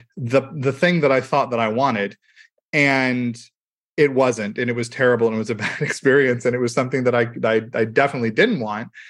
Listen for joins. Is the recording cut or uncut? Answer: uncut